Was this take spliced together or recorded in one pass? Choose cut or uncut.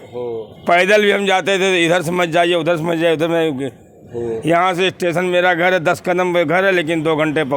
uncut